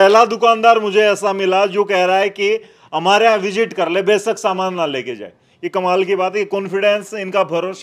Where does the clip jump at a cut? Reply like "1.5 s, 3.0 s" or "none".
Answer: none